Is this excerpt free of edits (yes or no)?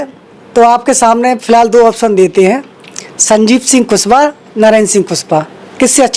yes